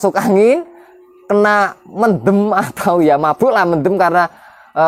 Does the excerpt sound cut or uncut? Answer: uncut